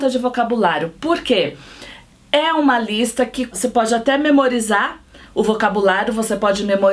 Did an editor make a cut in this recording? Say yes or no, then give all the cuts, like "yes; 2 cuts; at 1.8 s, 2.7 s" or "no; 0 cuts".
yes; 1 cut; at 3.5 s